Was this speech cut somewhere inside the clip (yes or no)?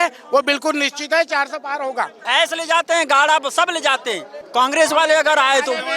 yes